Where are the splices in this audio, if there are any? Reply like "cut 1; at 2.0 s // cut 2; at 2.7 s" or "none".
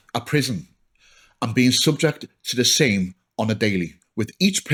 none